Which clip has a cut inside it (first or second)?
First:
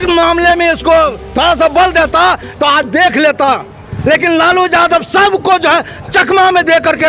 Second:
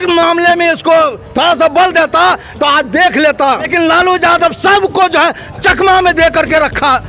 second